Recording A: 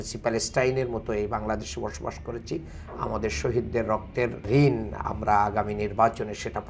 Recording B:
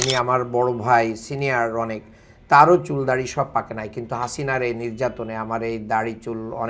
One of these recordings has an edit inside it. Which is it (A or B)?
A